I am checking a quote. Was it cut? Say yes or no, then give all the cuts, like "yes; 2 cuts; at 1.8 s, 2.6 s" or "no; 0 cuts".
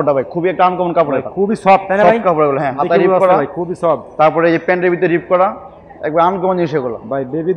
no; 0 cuts